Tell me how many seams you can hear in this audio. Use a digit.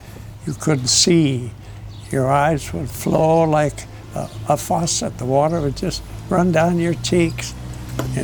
0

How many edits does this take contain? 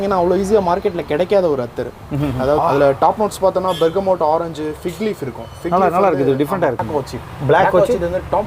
2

